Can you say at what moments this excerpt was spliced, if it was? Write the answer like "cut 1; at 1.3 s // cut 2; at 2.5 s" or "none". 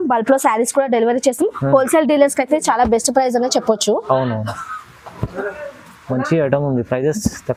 none